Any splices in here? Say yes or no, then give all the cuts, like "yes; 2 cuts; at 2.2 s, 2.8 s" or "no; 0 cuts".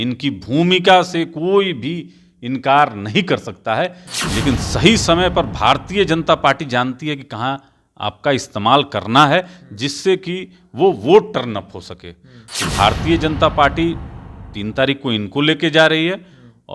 no; 0 cuts